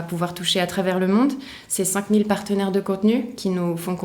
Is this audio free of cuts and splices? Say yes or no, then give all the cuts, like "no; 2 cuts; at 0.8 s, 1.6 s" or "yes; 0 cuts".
yes; 0 cuts